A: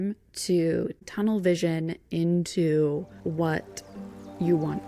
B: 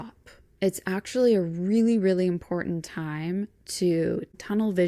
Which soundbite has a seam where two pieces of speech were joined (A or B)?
A